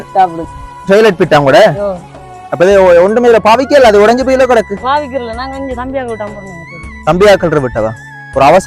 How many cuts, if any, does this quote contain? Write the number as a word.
zero